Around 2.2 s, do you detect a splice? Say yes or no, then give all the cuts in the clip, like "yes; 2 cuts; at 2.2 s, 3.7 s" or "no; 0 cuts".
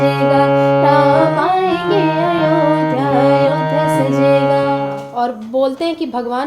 no; 1 cut; at 4.9 s